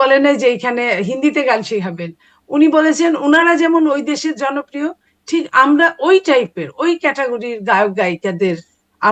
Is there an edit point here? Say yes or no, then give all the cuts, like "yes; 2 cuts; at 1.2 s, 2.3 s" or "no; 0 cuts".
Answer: no; 0 cuts